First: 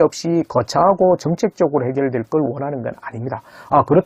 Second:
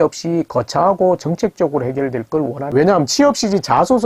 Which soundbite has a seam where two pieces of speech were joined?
second; 1 cut; at 2.6 s

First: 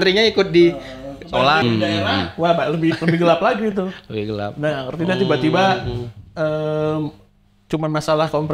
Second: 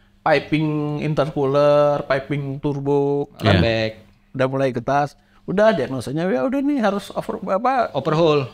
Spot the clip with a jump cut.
first; 1 cut; at 1.6 s

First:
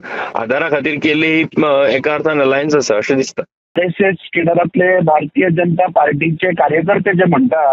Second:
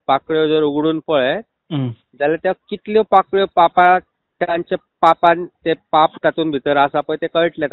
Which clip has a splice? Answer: first; 1 cut; at 3.8 s

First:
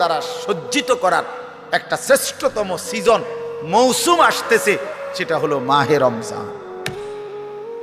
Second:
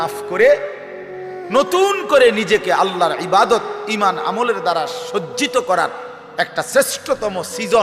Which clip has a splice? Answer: first; 1 cut; at 6.5 s

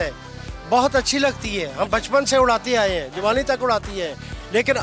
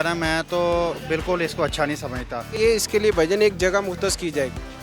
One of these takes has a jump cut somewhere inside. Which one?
second; 1 cut; at 2.5 s

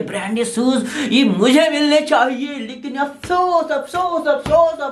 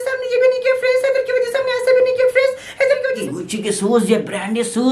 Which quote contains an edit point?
second; 1 cut; at 3.2 s

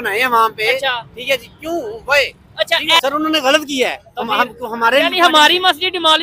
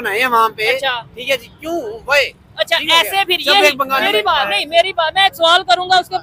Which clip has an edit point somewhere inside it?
first; 1 cut; at 3.0 s

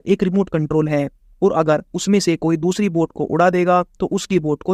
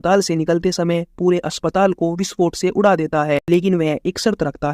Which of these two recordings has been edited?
second; 1 cut; at 3.4 s

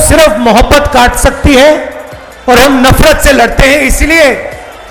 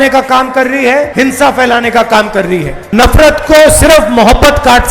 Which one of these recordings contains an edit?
second; 2 cuts; at 1.1 s, 2.8 s

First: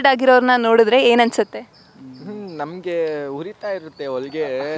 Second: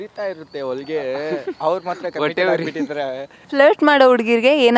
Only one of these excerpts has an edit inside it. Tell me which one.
second; 1 cut; at 3.3 s

